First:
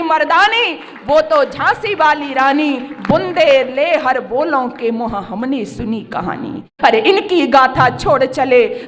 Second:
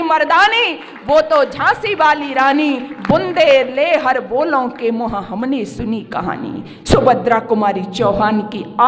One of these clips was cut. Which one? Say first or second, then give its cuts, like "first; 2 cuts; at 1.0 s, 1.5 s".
first; 1 cut; at 6.7 s